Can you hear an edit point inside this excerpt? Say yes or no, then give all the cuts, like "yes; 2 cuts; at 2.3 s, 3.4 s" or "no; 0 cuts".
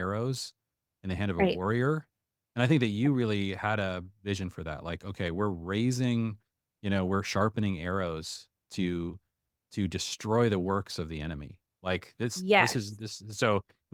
no; 0 cuts